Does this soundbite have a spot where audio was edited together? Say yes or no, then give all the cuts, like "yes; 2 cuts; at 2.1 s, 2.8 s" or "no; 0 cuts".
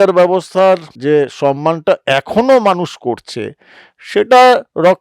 yes; 1 cut; at 0.9 s